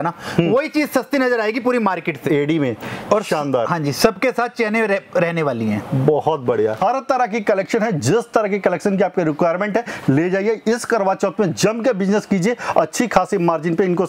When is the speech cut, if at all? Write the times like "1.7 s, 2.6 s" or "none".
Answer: 2.2 s, 6.8 s